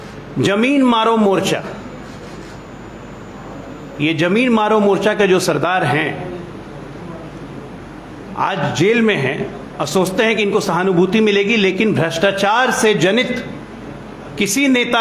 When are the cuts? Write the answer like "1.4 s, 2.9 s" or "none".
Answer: none